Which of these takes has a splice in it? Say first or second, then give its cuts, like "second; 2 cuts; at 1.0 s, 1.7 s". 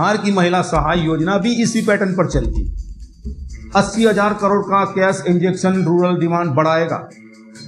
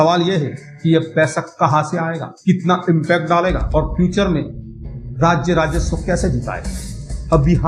first; 1 cut; at 3.3 s